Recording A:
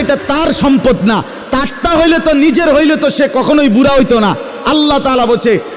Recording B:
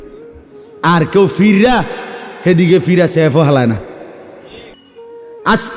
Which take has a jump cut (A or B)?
B